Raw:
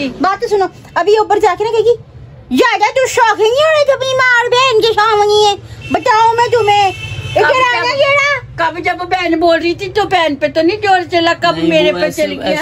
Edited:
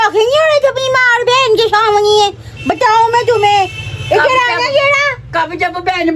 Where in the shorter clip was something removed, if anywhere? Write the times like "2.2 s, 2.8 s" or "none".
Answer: none